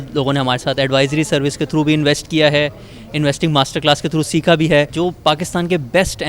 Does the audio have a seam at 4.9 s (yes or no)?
yes